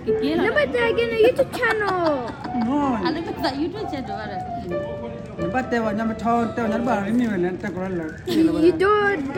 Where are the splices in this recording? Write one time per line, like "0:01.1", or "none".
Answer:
none